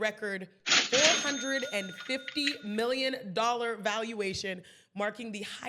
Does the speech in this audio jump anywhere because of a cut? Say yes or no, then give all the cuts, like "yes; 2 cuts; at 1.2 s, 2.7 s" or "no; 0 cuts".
no; 0 cuts